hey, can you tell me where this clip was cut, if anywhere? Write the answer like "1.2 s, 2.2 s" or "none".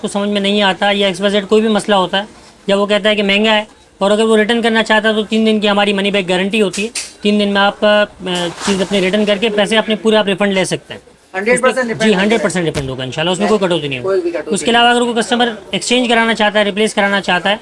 none